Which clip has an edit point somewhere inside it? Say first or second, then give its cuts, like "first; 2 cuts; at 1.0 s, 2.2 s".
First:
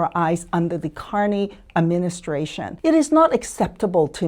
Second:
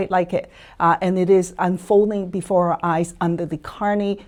first; 1 cut; at 2.6 s